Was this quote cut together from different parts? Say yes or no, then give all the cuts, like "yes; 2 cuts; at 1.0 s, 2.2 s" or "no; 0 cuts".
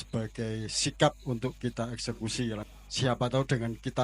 yes; 1 cut; at 2.6 s